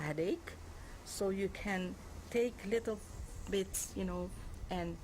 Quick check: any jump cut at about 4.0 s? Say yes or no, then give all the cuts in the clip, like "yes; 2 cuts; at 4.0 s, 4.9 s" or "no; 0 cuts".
no; 1 cut; at 2.2 s